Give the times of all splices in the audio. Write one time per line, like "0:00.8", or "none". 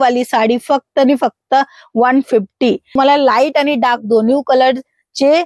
0:03.0

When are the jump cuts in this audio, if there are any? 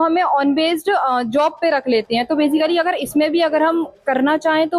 none

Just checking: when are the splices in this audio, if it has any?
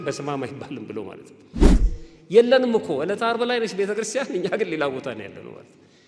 0:01.8

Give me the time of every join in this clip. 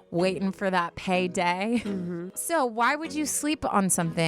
0:02.3

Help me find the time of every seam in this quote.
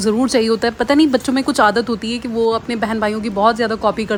none

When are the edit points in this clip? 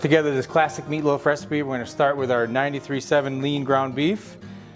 0:03.7

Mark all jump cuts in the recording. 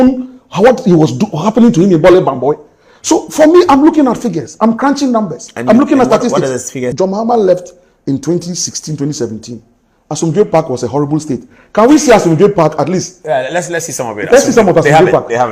0:06.8

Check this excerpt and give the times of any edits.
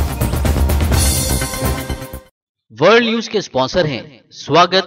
0:02.2

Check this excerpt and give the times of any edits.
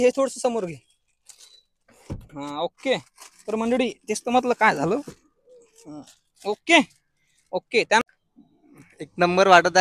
0:08.0

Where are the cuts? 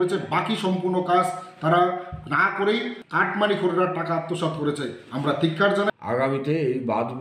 0:03.0
0:05.9

